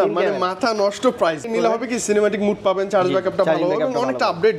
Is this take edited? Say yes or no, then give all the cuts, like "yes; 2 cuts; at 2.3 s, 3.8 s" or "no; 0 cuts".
yes; 1 cut; at 1.5 s